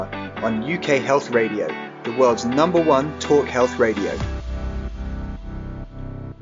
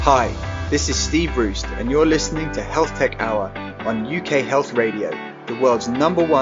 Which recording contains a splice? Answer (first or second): first